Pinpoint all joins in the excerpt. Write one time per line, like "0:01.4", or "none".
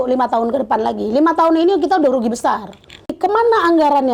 0:03.1